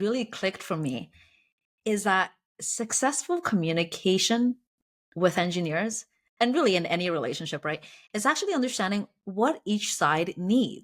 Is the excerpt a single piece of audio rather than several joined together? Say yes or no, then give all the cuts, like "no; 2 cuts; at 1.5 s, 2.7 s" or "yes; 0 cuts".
yes; 0 cuts